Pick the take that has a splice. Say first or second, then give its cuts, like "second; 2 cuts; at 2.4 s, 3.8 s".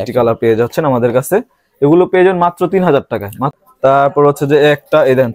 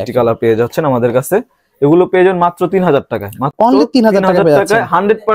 first; 1 cut; at 3.5 s